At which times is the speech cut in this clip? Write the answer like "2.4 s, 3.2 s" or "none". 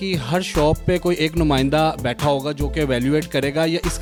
none